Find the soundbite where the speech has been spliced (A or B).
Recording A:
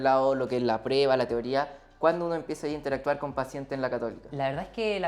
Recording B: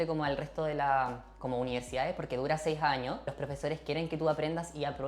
B